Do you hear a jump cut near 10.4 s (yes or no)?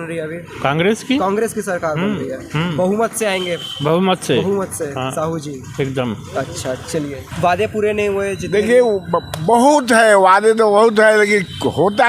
no